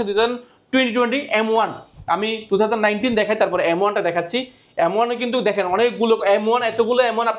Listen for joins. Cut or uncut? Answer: uncut